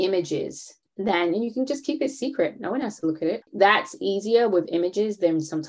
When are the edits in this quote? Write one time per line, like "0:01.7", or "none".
none